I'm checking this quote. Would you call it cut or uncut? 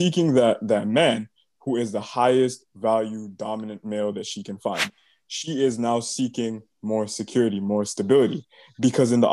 cut